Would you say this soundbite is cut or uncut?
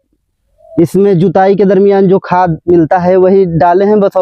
uncut